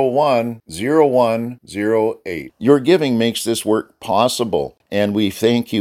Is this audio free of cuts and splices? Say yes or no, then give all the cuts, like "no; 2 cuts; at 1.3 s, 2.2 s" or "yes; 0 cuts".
no; 1 cut; at 4.8 s